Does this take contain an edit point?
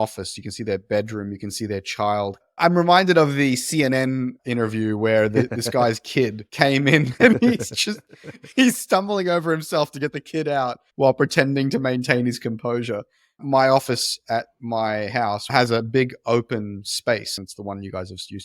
yes; 2 cuts; at 15.5 s, 17.3 s

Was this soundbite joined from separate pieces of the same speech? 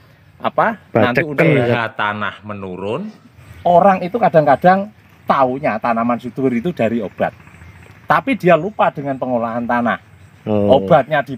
yes; 2 cuts; at 1.8 s, 3.4 s

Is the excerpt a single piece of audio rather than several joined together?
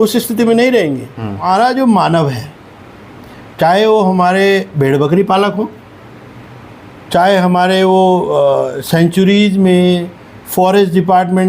no; 1 cut; at 1.4 s

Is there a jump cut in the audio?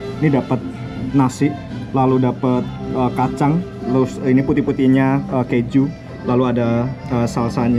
no; 0 cuts

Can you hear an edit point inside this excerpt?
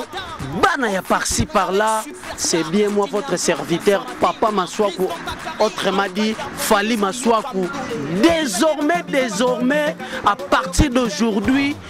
no; 0 cuts

